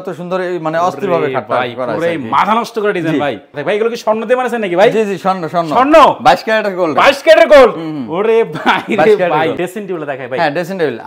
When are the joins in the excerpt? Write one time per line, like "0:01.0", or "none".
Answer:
0:03.5
0:09.6